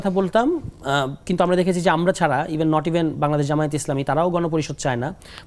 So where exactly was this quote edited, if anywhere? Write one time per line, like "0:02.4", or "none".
none